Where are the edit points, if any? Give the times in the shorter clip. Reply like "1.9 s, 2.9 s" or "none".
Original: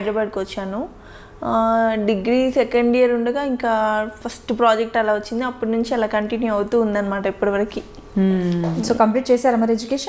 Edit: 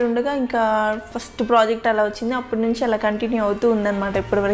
none